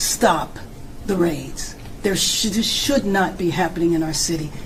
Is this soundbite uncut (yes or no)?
yes